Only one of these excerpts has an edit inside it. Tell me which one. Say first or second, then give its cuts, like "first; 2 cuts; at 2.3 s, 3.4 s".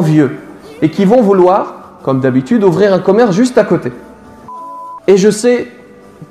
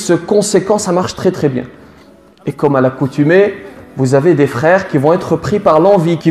first; 1 cut; at 4.5 s